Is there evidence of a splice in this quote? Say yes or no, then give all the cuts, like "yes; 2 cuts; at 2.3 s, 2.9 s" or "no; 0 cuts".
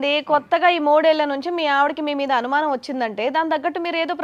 no; 0 cuts